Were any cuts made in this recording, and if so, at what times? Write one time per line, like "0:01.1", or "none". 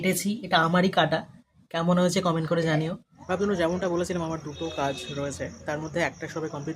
0:03.2

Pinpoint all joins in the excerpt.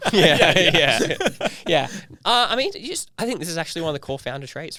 none

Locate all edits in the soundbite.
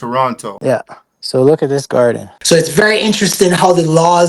0:02.5

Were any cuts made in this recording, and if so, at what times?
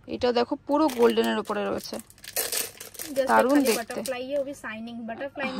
none

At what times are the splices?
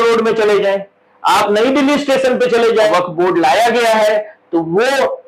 0:02.9

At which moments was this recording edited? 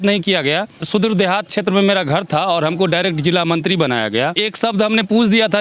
0:00.9
0:04.4

